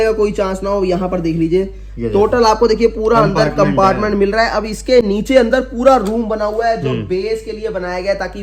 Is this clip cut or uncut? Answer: uncut